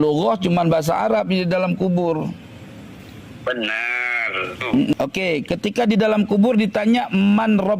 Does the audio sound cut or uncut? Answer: cut